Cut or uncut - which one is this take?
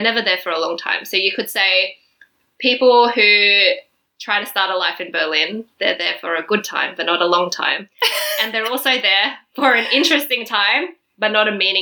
uncut